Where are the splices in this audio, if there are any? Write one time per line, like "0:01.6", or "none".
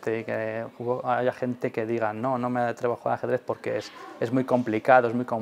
none